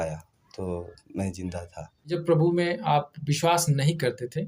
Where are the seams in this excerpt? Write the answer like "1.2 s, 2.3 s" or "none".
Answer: 2.2 s